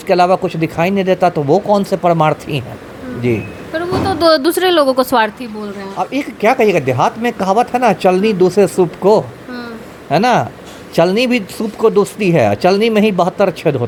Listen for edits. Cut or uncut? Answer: uncut